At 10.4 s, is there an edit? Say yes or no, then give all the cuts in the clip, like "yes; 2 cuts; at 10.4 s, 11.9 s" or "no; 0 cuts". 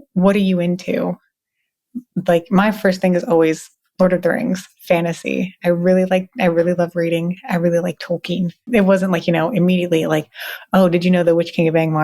no; 1 cut; at 8.7 s